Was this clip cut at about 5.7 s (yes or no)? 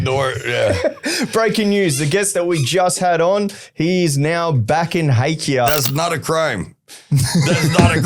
yes